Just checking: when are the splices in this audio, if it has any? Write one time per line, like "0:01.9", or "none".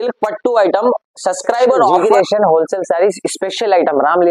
0:02.0